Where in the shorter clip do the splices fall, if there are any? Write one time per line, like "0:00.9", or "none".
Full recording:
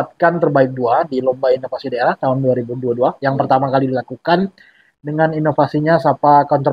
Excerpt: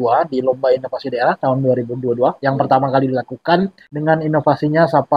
0:03.8